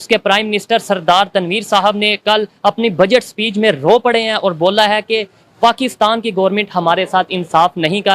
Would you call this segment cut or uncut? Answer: uncut